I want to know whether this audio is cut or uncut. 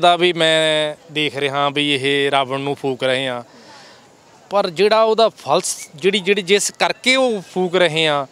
uncut